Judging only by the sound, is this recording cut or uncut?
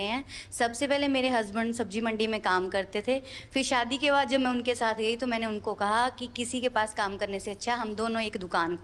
uncut